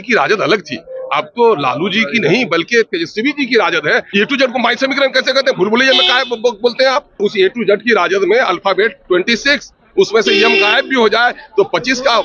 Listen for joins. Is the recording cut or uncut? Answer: cut